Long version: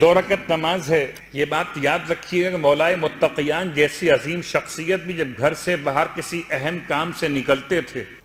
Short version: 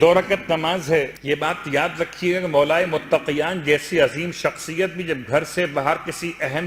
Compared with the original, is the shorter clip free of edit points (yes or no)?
no